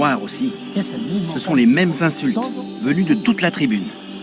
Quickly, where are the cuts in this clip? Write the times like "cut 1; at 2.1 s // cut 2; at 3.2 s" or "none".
none